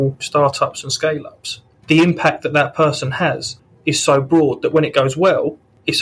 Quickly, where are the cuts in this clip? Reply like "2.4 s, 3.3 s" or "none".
none